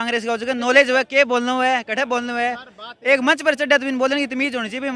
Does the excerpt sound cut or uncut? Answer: uncut